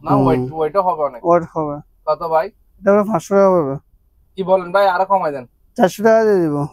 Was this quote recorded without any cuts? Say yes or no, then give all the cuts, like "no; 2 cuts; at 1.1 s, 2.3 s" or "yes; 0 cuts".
yes; 0 cuts